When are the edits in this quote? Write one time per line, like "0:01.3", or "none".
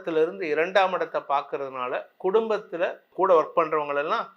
0:03.0